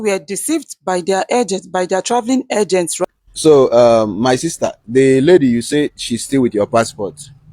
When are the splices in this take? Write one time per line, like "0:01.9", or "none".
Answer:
0:03.0